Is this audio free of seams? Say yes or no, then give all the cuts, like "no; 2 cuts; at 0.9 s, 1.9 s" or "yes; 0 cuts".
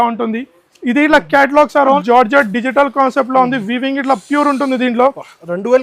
no; 1 cut; at 2.0 s